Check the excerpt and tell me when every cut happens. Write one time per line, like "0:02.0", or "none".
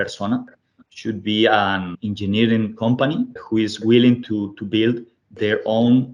0:02.0
0:03.4